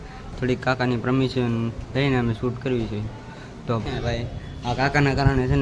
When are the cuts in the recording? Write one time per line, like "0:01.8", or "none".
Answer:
0:03.8